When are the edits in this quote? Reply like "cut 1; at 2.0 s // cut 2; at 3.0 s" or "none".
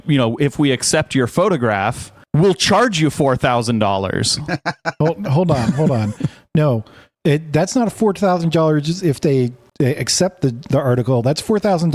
none